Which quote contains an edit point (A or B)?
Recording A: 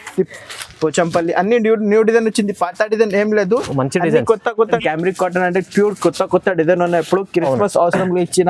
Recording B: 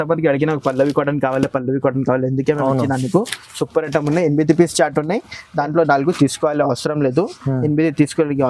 A